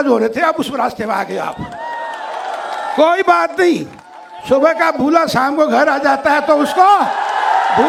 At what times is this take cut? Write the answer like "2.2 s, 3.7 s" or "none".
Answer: none